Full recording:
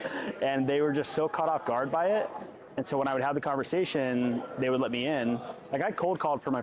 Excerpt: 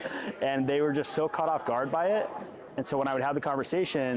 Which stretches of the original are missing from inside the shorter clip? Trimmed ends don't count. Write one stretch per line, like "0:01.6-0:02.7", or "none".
none